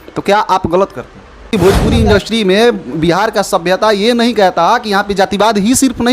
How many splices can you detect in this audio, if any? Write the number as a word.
one